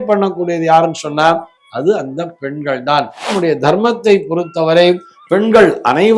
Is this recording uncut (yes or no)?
no